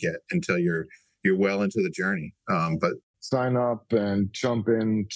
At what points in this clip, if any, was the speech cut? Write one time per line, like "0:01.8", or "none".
0:03.1